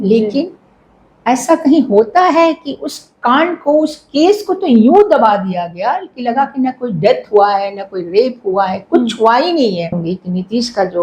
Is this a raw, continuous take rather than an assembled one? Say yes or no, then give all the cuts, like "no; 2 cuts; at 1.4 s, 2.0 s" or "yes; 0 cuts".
no; 1 cut; at 10.0 s